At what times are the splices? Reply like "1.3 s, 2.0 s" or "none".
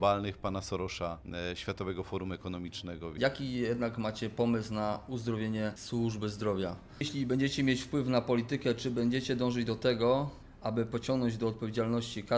1.2 s, 3.1 s, 5.8 s, 6.9 s